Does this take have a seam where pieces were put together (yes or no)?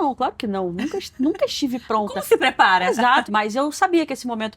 yes